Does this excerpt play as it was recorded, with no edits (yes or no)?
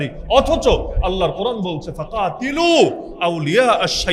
yes